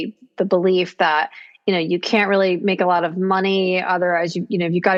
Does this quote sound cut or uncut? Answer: uncut